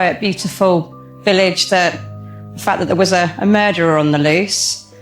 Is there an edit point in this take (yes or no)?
no